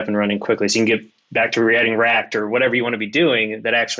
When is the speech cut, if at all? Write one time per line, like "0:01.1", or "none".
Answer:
none